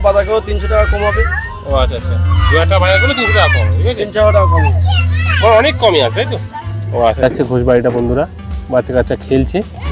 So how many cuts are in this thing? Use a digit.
1